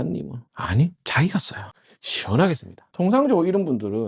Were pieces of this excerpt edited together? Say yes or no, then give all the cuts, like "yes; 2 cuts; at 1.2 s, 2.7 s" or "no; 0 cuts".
yes; 1 cut; at 2.8 s